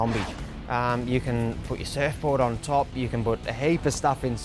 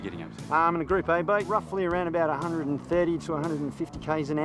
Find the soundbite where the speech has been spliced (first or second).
second